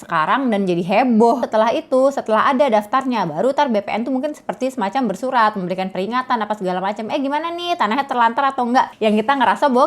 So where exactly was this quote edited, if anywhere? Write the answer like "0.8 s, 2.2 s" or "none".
1.4 s, 8.9 s